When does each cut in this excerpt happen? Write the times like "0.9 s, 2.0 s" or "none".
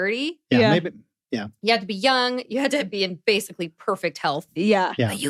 none